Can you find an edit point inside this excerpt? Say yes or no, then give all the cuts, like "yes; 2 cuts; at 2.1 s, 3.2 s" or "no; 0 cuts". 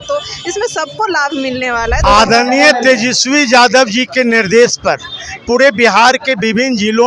yes; 1 cut; at 2.0 s